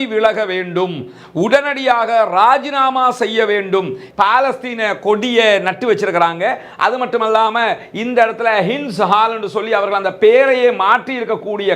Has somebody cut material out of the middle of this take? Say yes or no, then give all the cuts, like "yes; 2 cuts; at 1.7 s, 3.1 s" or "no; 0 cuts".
yes; 1 cut; at 4.0 s